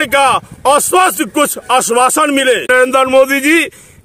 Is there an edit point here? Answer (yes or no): no